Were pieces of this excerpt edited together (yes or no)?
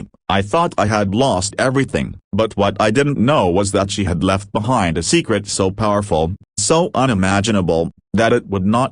no